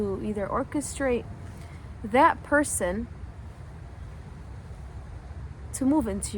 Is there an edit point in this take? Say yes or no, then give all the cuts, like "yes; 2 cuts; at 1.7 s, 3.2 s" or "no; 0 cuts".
no; 0 cuts